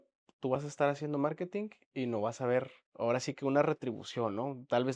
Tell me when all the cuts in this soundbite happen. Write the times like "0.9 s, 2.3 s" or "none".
1.8 s, 2.8 s